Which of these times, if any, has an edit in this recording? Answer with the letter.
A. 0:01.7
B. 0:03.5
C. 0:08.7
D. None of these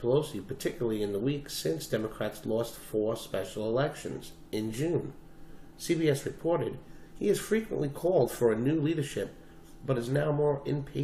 B